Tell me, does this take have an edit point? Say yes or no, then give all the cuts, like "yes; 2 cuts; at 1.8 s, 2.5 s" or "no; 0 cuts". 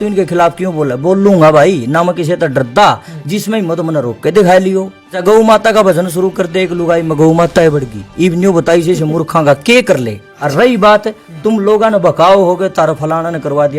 yes; 2 cuts; at 5.2 s, 10.2 s